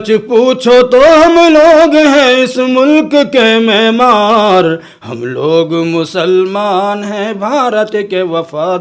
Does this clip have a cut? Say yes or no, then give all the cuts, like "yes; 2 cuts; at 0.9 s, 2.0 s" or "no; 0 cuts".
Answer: no; 0 cuts